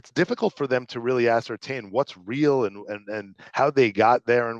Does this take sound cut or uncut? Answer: uncut